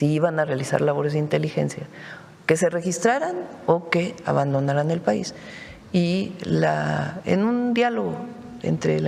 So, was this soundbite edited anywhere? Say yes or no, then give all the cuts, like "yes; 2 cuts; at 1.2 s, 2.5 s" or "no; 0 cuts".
no; 0 cuts